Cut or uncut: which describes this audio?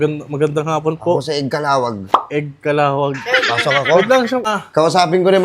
cut